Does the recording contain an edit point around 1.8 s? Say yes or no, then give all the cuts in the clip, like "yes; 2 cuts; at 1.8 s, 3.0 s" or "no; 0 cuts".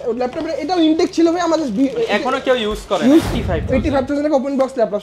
no; 1 cut; at 3.3 s